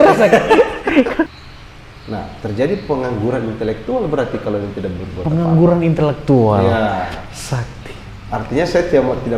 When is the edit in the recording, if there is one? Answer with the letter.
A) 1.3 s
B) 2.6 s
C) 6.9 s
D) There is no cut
A